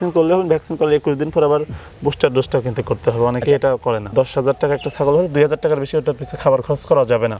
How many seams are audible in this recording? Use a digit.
1